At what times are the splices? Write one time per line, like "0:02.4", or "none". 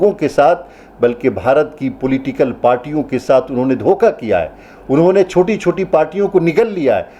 none